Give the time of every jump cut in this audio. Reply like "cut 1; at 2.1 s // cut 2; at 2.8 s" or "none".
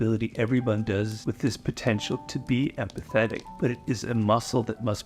cut 1; at 1.2 s // cut 2; at 3.4 s